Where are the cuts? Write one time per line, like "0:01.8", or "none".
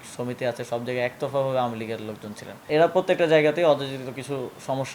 0:02.7